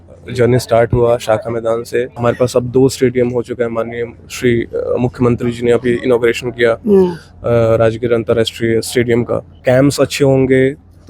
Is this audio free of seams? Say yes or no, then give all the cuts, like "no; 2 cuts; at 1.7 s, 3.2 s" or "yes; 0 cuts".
no; 2 cuts; at 2.1 s, 9.5 s